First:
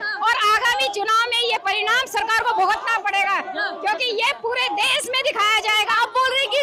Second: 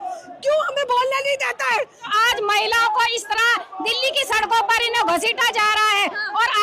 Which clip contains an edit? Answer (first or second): second